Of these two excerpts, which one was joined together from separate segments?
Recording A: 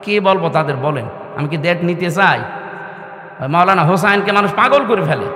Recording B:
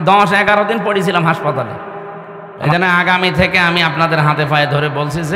B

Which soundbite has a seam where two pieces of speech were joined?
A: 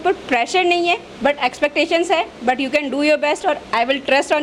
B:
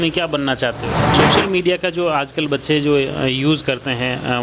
B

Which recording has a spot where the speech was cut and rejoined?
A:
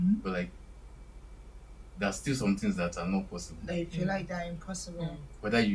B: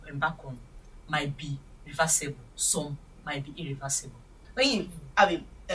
B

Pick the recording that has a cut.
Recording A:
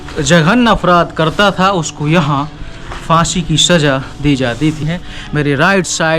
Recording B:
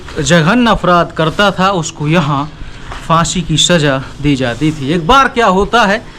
A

